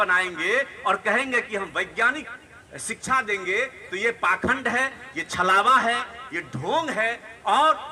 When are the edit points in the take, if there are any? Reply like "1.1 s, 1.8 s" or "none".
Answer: none